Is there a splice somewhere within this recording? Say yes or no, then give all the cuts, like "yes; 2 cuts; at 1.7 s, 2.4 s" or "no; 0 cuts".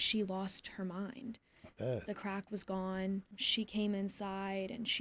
yes; 1 cut; at 3.4 s